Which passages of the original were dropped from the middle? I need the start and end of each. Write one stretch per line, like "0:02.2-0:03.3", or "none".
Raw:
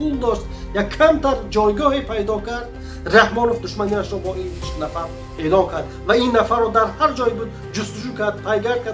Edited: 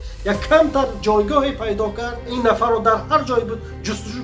0:02.8-0:06.2